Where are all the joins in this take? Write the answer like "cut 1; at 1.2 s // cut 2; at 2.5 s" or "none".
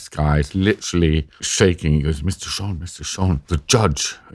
cut 1; at 1.5 s // cut 2; at 3.4 s